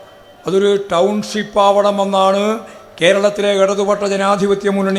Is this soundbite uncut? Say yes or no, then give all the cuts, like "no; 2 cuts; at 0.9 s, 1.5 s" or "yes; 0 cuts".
yes; 0 cuts